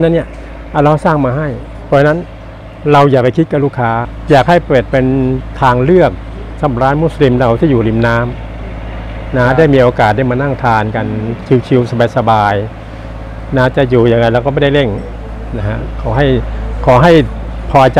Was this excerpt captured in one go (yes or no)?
no